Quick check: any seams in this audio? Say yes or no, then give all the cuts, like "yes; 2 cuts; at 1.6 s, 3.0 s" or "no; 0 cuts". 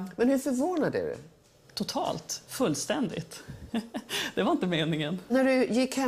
yes; 1 cut; at 2.7 s